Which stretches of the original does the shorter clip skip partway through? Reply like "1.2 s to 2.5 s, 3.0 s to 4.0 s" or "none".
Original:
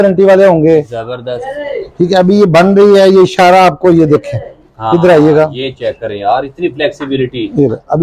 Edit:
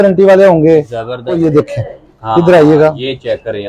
1.4 s to 3.9 s